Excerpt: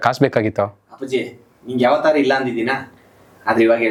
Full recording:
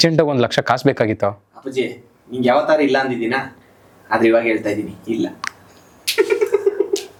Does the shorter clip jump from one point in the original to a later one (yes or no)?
no